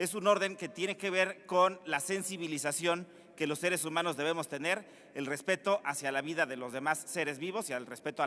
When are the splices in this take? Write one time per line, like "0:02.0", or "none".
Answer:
0:01.9